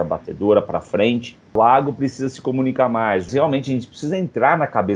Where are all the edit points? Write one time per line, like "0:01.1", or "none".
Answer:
0:01.6
0:03.3

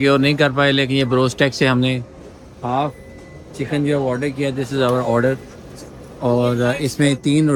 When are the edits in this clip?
none

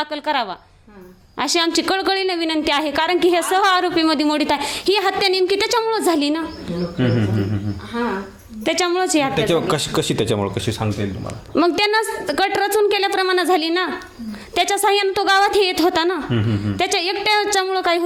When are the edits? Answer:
none

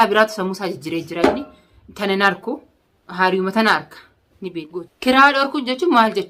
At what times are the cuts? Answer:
0:04.6

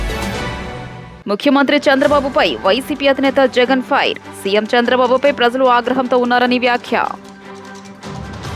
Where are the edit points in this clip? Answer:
0:01.0

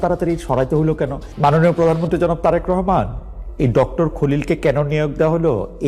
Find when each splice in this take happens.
0:01.2

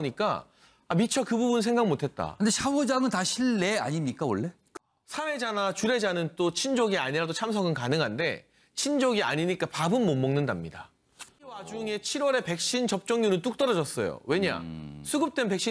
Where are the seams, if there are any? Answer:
0:04.7
0:11.7

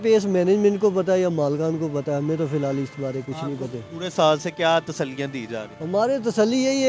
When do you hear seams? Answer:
none

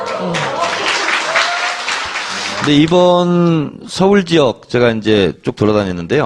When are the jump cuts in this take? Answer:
0:02.4

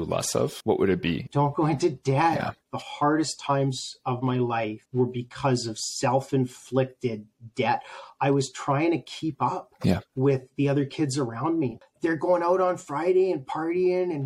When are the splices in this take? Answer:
0:01.2
0:02.6
0:04.8
0:11.8

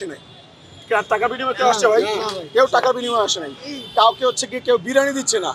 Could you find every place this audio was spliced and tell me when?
none

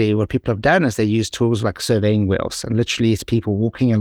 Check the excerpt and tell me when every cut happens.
none

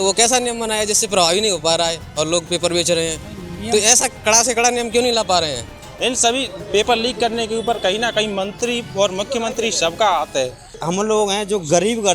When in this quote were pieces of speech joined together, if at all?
0:05.7
0:10.8

